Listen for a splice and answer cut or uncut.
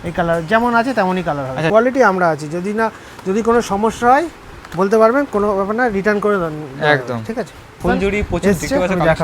cut